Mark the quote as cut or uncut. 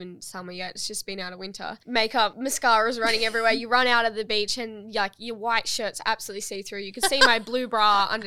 cut